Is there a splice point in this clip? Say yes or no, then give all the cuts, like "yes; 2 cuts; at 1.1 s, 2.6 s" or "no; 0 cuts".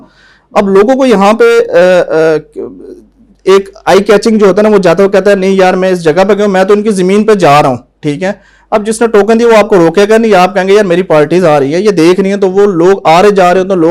no; 0 cuts